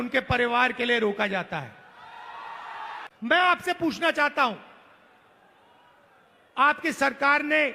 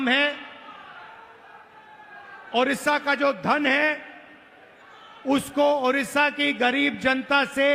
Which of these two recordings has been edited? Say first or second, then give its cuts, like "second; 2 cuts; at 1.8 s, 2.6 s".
first; 1 cut; at 3.0 s